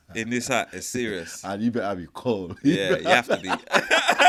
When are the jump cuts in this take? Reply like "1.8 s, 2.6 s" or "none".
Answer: none